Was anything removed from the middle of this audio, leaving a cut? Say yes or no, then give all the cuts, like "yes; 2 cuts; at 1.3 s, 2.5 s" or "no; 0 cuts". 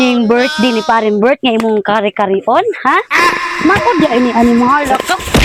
no; 0 cuts